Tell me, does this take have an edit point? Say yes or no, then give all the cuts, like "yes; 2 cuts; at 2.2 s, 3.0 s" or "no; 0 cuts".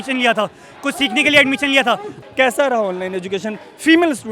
yes; 1 cut; at 2.2 s